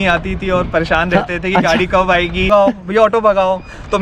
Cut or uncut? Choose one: cut